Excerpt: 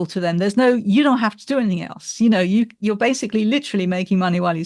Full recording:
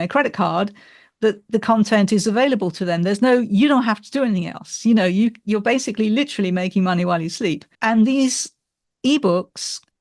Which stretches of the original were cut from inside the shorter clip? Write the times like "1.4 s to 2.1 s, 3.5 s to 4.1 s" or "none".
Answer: none

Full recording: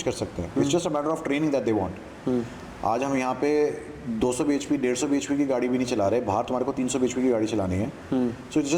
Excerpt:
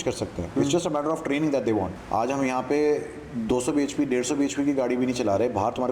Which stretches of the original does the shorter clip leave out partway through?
2.0 s to 2.7 s

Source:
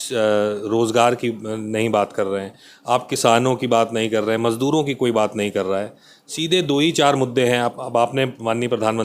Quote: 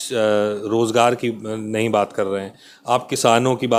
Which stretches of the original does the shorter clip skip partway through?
none

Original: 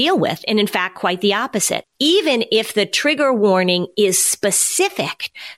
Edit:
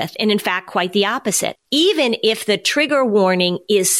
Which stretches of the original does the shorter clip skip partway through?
none

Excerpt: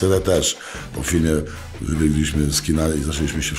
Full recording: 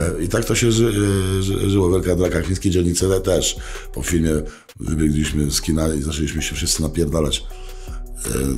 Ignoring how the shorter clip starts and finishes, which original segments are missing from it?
none

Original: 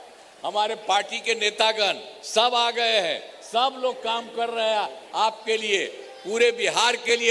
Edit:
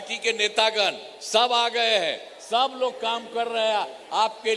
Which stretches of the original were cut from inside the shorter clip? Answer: none

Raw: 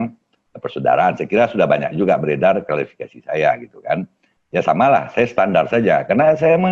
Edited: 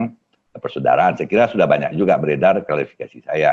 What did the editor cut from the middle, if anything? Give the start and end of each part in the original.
none

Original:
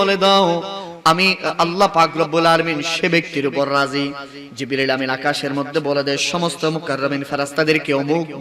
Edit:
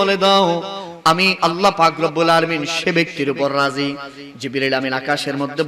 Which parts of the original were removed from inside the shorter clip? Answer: 1.4 s to 1.5 s

